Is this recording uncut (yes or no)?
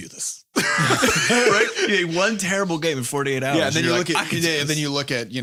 yes